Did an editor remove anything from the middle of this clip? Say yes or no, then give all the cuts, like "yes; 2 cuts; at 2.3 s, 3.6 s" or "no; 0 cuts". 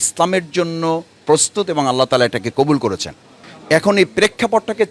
no; 0 cuts